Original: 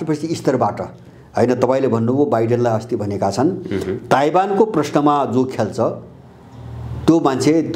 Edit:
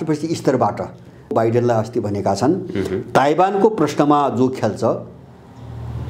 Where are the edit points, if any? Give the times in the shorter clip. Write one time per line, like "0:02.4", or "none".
0:01.3